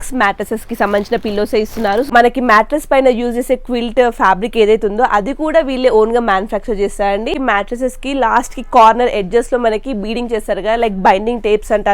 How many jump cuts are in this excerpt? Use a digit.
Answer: 2